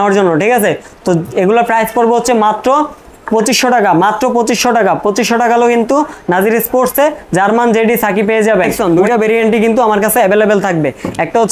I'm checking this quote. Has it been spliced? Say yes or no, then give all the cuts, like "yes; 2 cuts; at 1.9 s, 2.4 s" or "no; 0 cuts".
yes; 1 cut; at 8.7 s